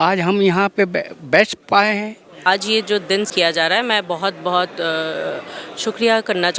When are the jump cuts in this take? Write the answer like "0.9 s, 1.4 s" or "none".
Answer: 2.5 s